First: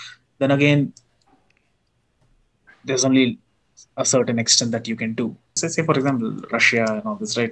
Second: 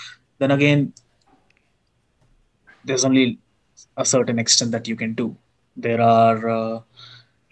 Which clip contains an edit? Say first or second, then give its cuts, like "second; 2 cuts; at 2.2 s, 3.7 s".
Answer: first; 1 cut; at 5.6 s